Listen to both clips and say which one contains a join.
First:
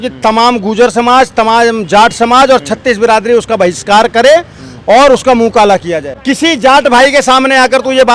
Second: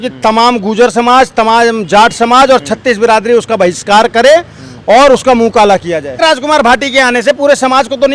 first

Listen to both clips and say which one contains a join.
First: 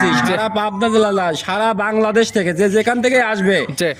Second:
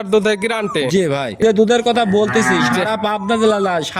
second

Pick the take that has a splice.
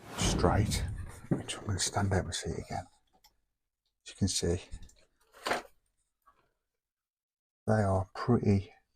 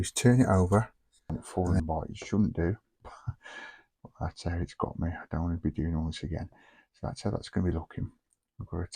second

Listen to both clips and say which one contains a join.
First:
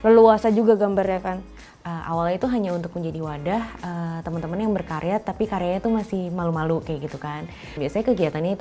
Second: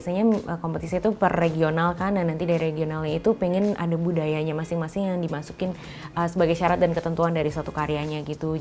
first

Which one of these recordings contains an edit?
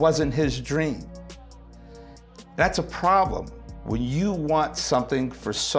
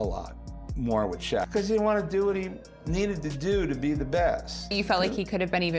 second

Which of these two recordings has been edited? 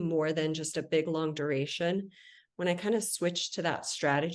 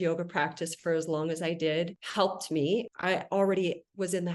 second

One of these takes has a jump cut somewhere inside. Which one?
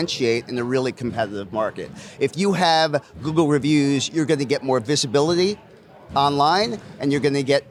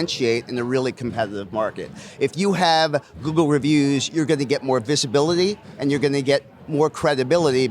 second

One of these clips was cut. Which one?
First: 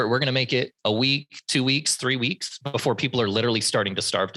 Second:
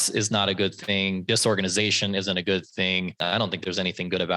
second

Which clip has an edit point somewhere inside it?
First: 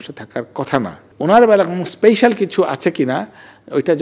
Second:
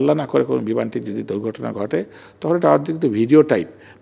first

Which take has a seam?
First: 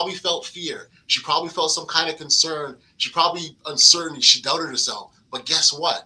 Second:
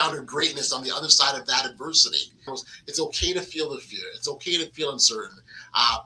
second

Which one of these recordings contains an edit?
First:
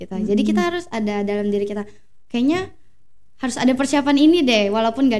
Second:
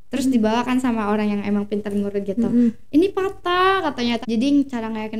second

